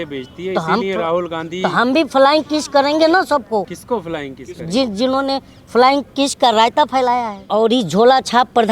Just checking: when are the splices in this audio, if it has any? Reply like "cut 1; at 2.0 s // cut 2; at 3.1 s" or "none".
cut 1; at 3.8 s // cut 2; at 7.4 s